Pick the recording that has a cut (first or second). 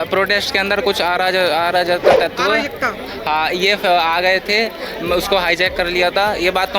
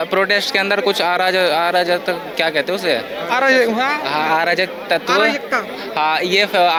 first